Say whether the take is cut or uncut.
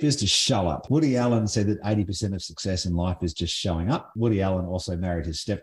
cut